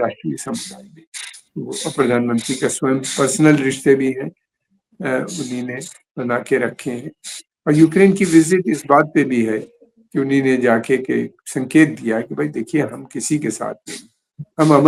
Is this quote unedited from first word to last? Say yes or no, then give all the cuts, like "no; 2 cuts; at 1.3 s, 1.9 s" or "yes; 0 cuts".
yes; 0 cuts